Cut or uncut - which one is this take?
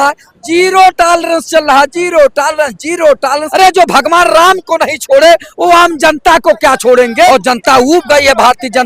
cut